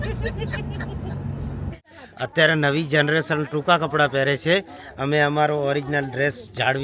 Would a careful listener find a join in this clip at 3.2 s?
no; 1 cut; at 1.7 s

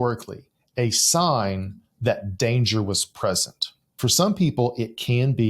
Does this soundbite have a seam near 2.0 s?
no; 1 cut; at 3.9 s

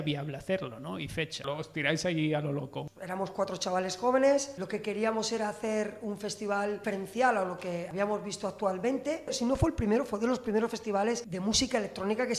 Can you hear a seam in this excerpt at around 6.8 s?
yes; 7 cuts; at 1.4 s, 2.8 s, 4.6 s, 6.8 s, 7.9 s, 9.3 s, 11.3 s

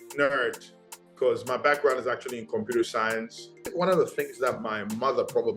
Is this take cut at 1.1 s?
no; 1 cut; at 3.7 s

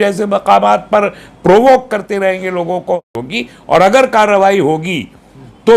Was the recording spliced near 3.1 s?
yes; 1 cut; at 3.1 s

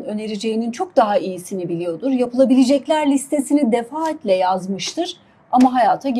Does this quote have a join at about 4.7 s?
no; 0 cuts

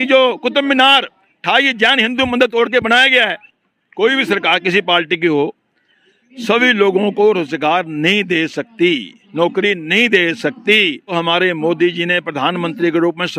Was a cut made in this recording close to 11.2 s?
yes; 2 cuts; at 3.4 s, 11.2 s

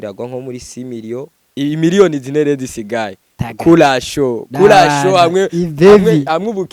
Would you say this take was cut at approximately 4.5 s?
no; 1 cut; at 1.4 s

